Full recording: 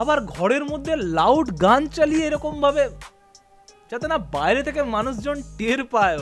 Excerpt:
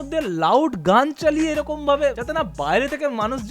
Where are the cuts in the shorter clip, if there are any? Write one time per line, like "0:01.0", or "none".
0:02.2